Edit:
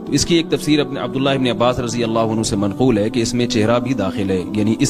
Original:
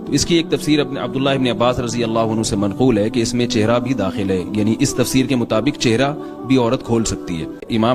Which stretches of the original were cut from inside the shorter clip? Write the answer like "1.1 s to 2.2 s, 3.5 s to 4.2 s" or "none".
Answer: none